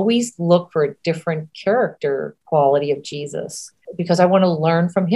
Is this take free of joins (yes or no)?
no